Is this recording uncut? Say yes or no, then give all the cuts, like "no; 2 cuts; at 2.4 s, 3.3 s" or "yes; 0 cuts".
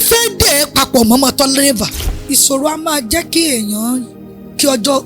no; 1 cut; at 1.9 s